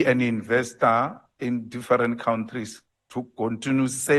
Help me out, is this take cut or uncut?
uncut